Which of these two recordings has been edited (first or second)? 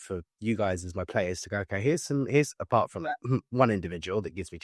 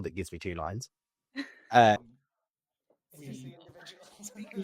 second